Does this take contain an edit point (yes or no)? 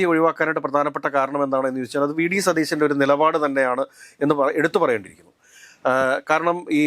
no